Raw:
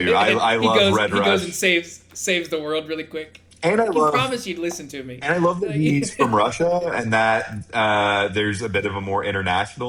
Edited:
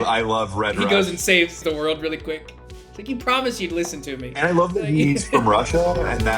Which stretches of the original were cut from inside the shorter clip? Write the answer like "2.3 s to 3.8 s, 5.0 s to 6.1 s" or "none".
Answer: 1.9 s to 2.4 s